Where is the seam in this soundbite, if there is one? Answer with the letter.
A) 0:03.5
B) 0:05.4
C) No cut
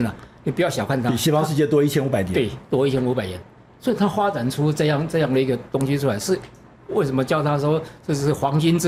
C